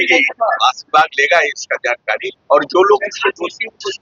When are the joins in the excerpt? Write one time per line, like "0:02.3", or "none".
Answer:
0:02.3